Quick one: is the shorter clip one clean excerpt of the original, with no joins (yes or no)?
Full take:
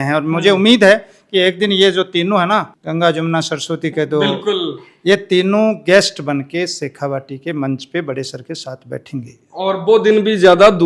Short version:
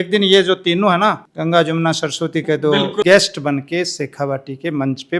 no